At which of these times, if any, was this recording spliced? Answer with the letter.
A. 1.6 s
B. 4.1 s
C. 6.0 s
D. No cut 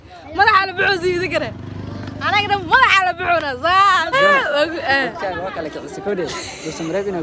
B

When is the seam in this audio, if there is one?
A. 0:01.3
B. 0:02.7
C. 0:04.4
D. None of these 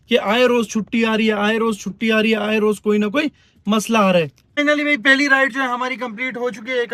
C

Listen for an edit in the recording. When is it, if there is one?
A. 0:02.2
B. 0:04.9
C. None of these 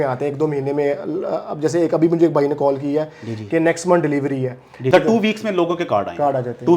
B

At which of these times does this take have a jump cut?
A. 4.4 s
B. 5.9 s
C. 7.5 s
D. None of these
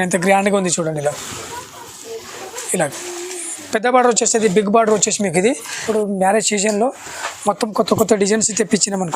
B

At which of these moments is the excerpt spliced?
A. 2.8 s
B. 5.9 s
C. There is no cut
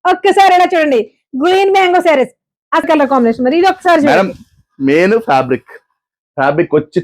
A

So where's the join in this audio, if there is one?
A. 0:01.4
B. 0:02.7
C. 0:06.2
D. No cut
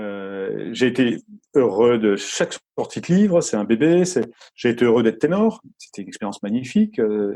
D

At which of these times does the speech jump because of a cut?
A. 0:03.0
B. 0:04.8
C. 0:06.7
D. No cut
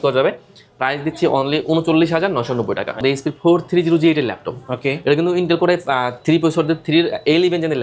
A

